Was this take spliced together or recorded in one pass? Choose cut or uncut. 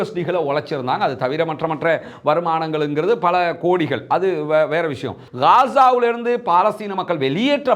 cut